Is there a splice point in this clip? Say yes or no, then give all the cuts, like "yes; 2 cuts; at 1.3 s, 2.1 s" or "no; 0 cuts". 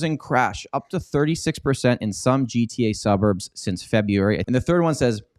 yes; 1 cut; at 4.4 s